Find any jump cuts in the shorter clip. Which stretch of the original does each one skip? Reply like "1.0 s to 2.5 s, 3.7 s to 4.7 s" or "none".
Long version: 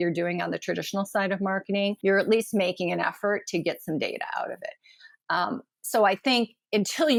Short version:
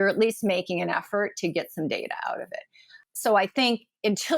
5.1 s to 5.7 s